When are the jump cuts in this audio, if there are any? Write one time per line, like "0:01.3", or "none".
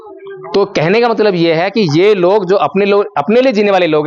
none